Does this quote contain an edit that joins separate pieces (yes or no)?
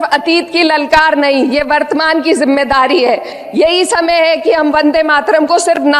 yes